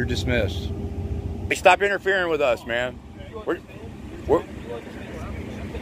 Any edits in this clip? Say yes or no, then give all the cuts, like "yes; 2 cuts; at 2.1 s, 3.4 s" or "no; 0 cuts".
yes; 1 cut; at 1.5 s